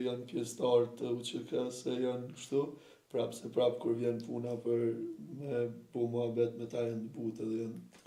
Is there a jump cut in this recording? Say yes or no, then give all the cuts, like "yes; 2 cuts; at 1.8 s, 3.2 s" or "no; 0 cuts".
no; 0 cuts